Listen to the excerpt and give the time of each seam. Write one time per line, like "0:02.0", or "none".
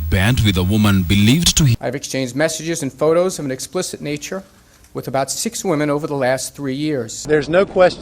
0:01.7